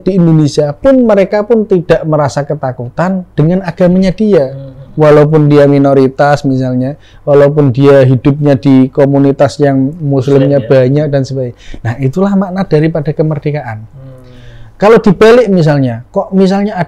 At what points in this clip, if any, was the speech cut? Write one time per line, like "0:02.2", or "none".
none